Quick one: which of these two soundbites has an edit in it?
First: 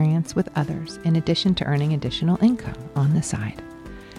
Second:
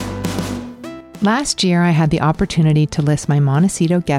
second; 1 cut; at 1.1 s

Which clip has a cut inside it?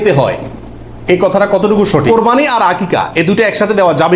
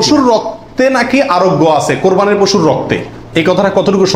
first; 1 cut; at 2.1 s

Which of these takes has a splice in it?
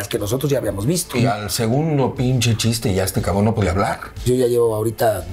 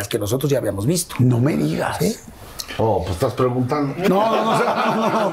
first; 2 cuts; at 1.2 s, 4.1 s

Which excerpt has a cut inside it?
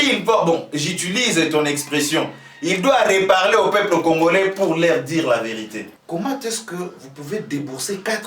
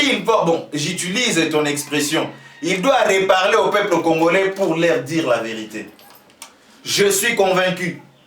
first; 1 cut; at 5.9 s

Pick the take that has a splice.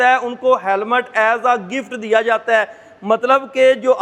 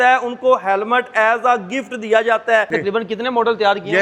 second; 1 cut; at 2.7 s

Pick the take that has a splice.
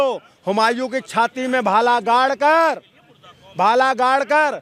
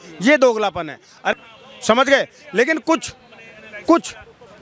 second; 1 cut; at 1.3 s

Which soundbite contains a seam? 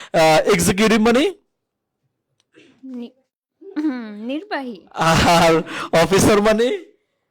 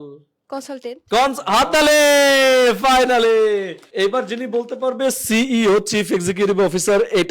second; 1 cut; at 3.8 s

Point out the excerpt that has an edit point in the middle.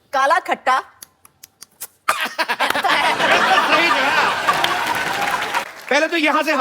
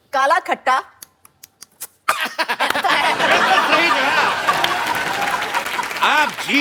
first; 1 cut; at 5.7 s

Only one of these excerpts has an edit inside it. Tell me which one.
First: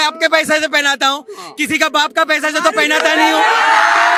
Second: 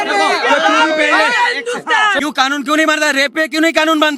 second; 1 cut; at 2.2 s

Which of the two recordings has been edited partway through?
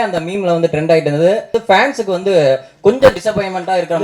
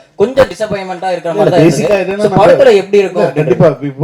first; 1 cut; at 1.5 s

